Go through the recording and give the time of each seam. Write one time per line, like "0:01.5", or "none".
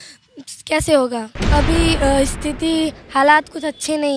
0:01.4